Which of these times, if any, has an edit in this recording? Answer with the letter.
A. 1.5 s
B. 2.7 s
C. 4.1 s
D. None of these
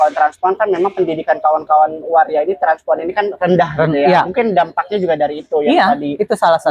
D